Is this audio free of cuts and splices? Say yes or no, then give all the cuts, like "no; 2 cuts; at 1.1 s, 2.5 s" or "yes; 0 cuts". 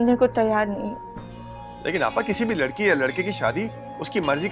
yes; 0 cuts